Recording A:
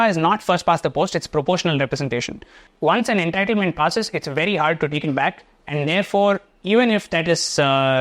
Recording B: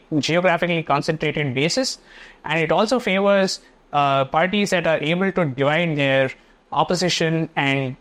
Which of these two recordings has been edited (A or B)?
A